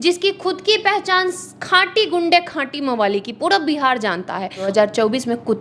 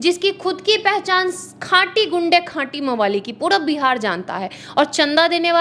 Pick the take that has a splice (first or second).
first